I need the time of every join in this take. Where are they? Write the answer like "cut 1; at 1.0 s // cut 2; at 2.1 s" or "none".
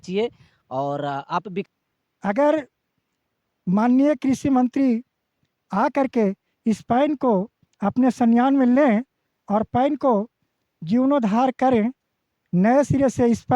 cut 1; at 1.6 s